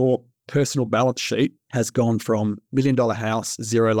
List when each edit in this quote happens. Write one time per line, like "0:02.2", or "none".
0:01.6